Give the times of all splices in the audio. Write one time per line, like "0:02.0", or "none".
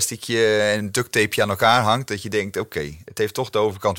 none